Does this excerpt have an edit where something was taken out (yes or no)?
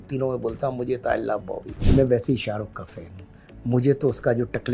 yes